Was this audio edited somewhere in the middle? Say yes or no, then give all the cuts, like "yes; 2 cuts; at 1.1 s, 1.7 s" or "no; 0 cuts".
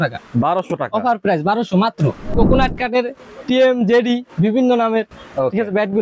yes; 1 cut; at 2.3 s